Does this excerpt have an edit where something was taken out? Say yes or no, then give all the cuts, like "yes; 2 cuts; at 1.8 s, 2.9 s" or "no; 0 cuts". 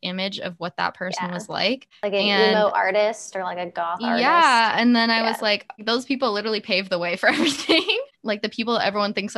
yes; 3 cuts; at 1.9 s, 5.8 s, 8.1 s